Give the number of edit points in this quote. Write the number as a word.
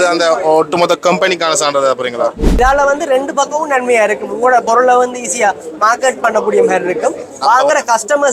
one